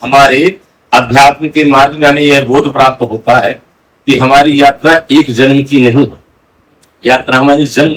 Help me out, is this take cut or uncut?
uncut